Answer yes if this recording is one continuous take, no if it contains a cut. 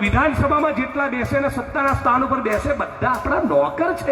yes